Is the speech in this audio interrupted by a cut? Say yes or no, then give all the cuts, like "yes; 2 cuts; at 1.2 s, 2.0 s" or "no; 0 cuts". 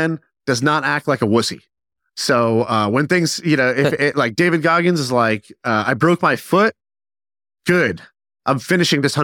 no; 0 cuts